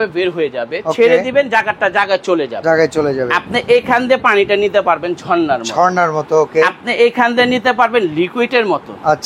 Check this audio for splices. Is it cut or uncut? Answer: uncut